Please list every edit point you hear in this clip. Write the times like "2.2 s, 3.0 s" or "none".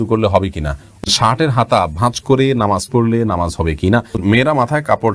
1.0 s, 4.2 s